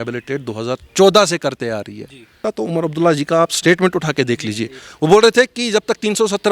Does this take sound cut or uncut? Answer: cut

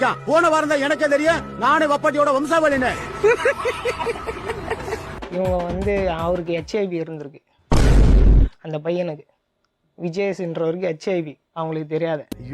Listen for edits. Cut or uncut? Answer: cut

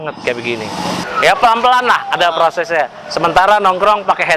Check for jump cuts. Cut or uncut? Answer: cut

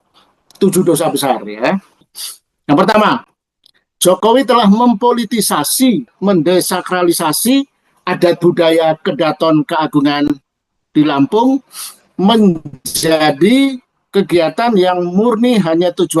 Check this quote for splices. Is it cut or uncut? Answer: uncut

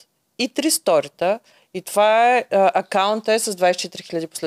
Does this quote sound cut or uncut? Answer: uncut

